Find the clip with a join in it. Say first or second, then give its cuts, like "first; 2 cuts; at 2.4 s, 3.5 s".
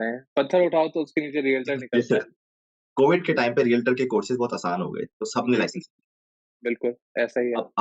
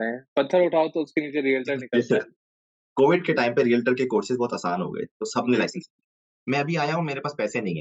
second; 1 cut; at 6.3 s